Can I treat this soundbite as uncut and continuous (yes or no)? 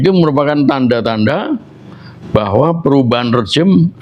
yes